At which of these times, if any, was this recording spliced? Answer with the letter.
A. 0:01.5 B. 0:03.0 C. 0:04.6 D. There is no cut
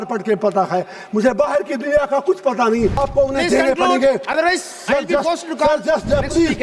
B